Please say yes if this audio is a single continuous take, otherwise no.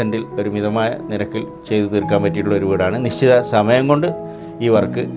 yes